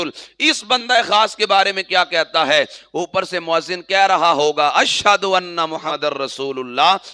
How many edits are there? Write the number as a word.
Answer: one